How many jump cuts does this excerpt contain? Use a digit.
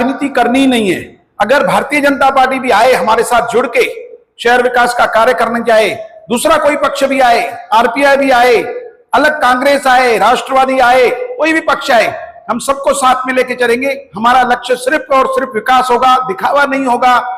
0